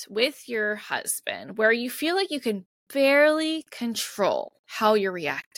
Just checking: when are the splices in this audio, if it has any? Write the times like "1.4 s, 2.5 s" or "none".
4.6 s